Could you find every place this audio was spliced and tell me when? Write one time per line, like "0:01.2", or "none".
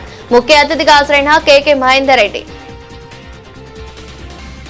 none